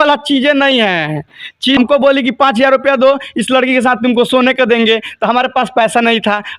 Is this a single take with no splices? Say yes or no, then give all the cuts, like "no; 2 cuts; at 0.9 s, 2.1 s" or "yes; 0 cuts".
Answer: no; 1 cut; at 1.8 s